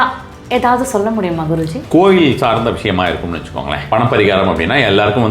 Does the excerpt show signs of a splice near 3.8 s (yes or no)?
yes